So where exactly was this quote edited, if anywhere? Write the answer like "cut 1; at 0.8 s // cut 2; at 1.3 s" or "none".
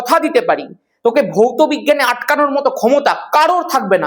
none

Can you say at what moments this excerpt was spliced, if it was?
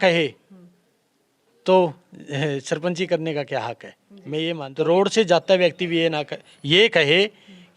cut 1; at 4.7 s

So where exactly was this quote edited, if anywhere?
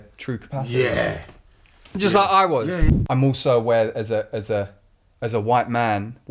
cut 1; at 2.9 s

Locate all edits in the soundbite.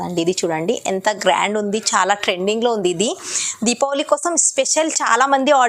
none

